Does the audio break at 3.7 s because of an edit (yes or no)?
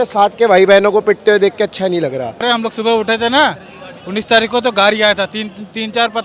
no